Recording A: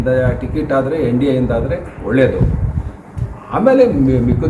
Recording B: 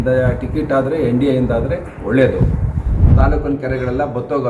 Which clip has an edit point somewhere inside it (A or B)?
B